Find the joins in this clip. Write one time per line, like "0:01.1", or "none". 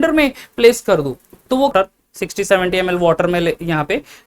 0:01.7